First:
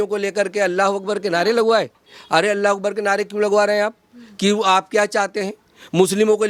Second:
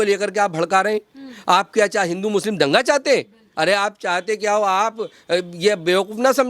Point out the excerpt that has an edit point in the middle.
second; 1 cut; at 3.4 s

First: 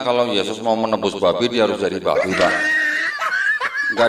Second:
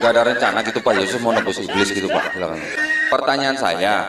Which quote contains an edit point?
second; 1 cut; at 3.0 s

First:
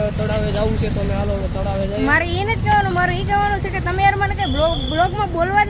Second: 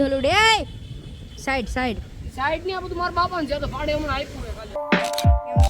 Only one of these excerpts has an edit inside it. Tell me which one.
second; 1 cut; at 4.8 s

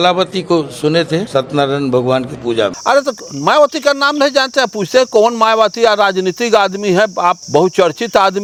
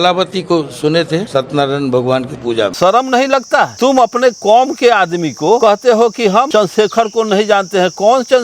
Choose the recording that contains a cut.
second; 4 cuts; at 2.7 s, 3.7 s, 5.6 s, 6.5 s

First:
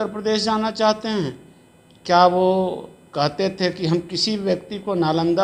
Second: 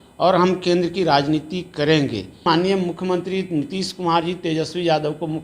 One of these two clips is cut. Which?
second; 1 cut; at 2.3 s

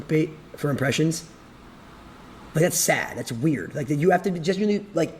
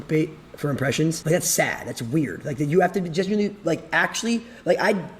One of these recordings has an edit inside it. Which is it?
second; 1 cut; at 1.2 s

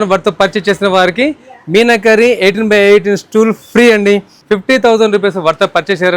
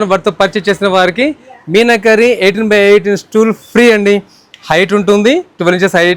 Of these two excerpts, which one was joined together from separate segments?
first; 1 cut; at 4.3 s

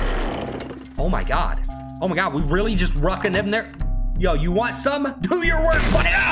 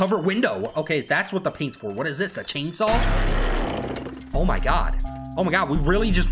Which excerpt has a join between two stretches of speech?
first; 1 cut; at 5.2 s

